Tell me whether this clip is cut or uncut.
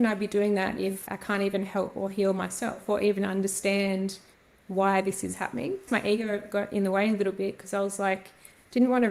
cut